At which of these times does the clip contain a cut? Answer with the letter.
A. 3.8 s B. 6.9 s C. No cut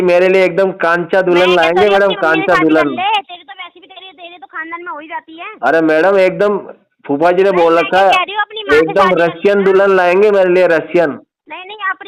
C